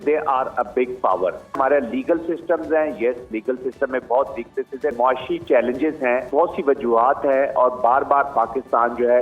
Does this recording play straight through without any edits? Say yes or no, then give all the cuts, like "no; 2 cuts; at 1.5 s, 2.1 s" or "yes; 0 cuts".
no; 3 cuts; at 1.6 s, 4.9 s, 6.3 s